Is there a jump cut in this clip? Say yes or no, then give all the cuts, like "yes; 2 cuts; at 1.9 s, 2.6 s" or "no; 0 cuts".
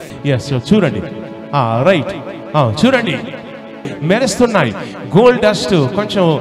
yes; 1 cut; at 3.8 s